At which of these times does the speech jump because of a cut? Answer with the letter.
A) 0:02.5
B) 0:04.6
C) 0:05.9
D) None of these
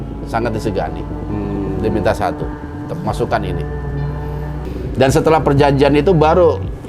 B